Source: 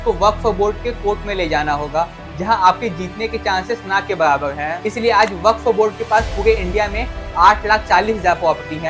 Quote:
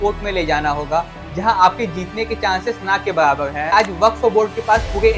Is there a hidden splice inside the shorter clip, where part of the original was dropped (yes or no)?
yes